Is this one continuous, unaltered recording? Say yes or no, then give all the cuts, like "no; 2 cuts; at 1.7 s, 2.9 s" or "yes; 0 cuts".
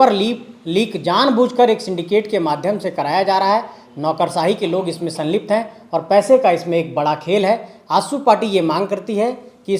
yes; 0 cuts